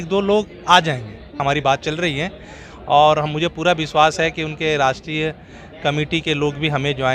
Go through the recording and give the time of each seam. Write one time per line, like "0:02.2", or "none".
0:01.4